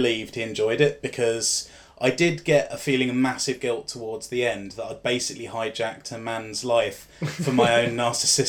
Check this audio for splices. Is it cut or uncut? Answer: uncut